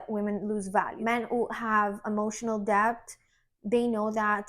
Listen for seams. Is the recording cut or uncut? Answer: cut